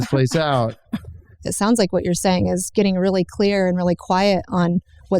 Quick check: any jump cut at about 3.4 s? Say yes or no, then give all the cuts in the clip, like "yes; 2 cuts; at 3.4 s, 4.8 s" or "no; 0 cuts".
no; 1 cut; at 1.4 s